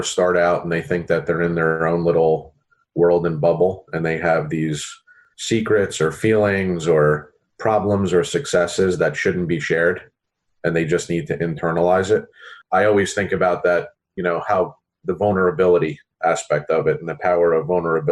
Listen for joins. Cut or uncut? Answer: cut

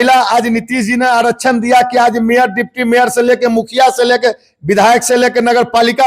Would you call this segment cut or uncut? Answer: uncut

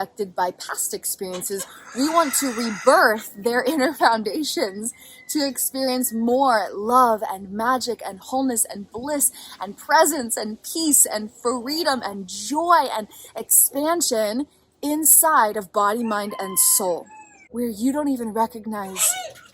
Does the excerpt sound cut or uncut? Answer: cut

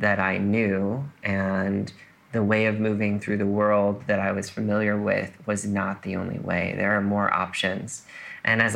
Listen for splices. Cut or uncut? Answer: uncut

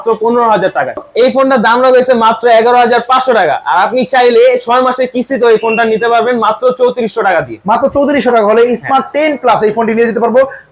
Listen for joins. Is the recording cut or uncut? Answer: cut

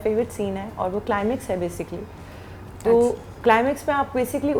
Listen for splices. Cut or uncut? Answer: uncut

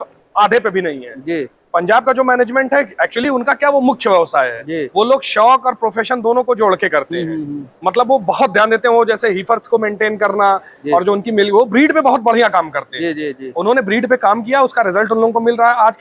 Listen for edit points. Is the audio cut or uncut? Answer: uncut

